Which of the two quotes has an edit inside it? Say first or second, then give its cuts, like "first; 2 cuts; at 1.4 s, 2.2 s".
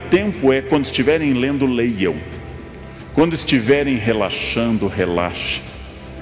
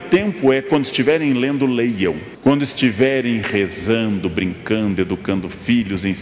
second; 1 cut; at 2.3 s